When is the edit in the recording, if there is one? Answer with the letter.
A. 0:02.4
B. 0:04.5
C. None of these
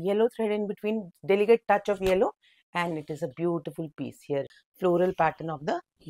B